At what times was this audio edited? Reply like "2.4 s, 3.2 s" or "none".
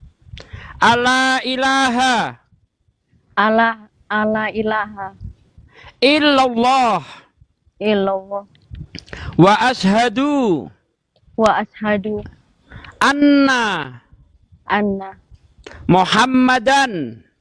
none